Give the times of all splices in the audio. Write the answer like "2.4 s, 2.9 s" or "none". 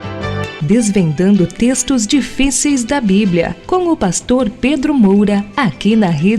5.5 s